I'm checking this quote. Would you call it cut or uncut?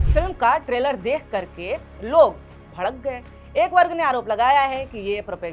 uncut